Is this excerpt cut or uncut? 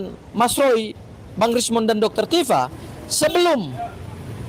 uncut